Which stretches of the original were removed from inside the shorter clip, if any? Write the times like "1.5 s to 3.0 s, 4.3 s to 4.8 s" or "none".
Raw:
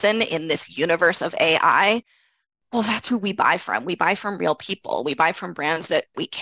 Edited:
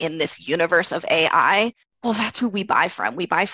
2.2 s to 2.6 s